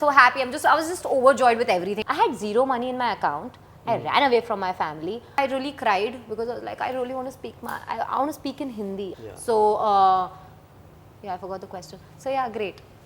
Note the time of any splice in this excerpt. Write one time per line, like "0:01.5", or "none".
0:01.9
0:05.4
0:09.1

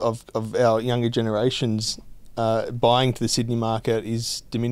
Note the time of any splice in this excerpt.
none

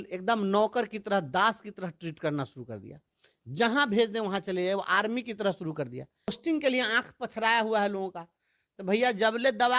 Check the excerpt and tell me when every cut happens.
0:06.4

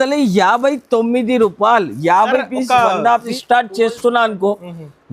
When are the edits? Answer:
0:03.3

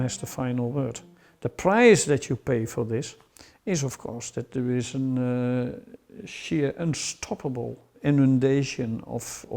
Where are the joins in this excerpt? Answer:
0:08.0

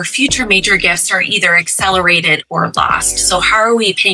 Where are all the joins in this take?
none

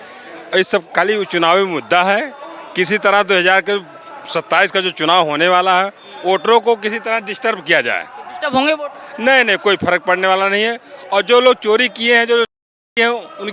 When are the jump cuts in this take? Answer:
none

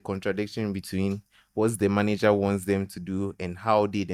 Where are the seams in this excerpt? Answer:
none

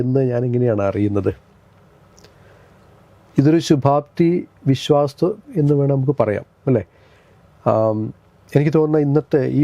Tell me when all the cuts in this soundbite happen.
none

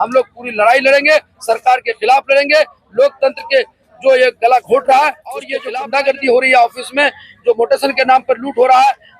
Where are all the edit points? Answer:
0:05.6

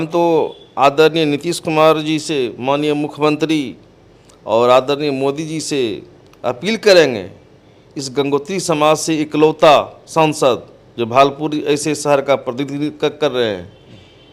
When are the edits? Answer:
none

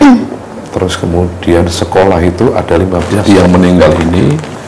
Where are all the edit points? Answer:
0:03.2

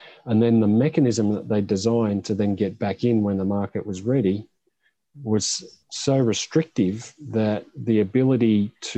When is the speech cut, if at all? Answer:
none

